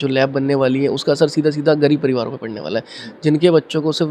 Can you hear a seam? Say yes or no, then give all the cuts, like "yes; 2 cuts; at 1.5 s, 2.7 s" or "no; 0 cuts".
no; 0 cuts